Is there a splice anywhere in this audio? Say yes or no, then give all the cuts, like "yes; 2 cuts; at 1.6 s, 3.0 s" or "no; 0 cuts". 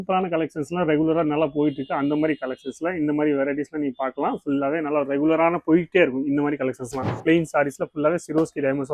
yes; 1 cut; at 7.2 s